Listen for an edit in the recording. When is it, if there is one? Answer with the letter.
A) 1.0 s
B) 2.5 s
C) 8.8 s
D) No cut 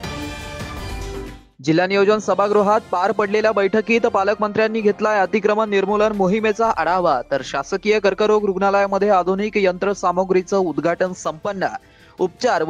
A